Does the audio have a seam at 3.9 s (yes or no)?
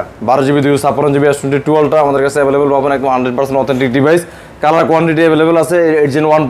no